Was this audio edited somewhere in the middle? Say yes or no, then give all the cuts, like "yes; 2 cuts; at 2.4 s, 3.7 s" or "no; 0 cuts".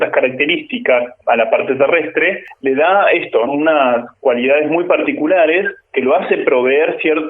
yes; 4 cuts; at 1.2 s, 2.5 s, 3.5 s, 5.8 s